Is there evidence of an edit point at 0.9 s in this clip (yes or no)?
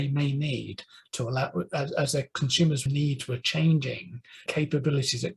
no